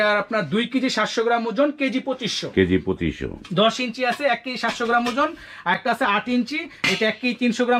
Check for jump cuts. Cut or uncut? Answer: uncut